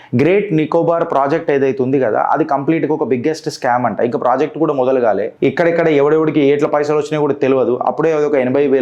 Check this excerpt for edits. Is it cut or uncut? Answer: cut